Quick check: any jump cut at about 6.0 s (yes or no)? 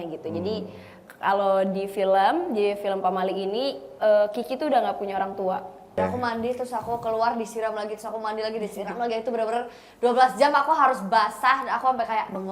yes